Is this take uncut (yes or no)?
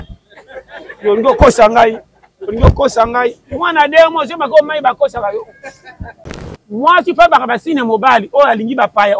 no